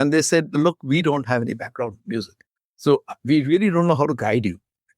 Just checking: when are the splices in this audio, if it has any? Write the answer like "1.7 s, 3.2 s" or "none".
none